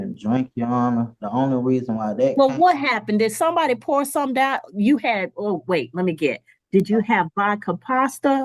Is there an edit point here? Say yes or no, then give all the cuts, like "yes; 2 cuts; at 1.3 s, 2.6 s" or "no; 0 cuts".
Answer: no; 0 cuts